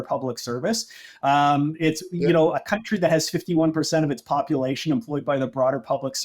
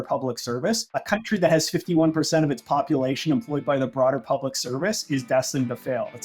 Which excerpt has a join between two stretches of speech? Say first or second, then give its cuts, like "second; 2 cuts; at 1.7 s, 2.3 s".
second; 1 cut; at 1.0 s